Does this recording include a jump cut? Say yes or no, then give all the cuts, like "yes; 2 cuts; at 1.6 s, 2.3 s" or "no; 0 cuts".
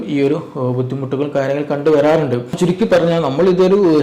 yes; 1 cut; at 2.6 s